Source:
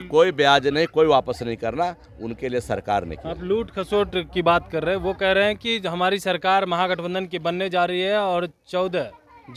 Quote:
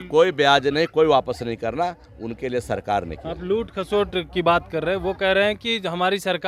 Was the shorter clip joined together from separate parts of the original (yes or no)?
no